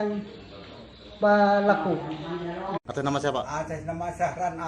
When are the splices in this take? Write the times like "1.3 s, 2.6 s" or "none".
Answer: 2.8 s

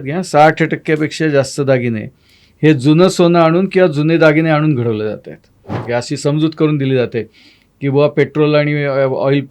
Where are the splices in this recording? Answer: 5.8 s

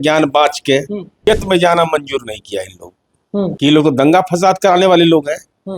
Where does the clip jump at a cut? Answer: 1.2 s, 3.5 s

